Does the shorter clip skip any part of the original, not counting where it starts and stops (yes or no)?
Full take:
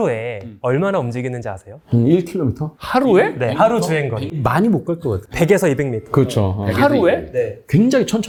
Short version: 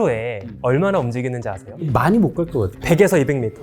yes